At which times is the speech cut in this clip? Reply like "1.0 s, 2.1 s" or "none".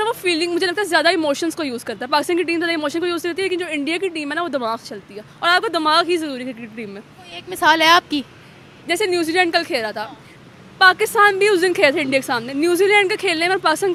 none